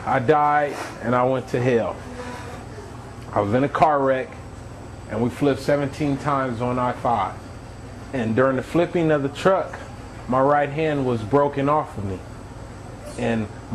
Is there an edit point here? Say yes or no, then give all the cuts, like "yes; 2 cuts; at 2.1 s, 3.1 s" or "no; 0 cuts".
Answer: no; 0 cuts